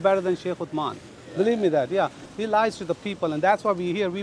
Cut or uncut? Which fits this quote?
cut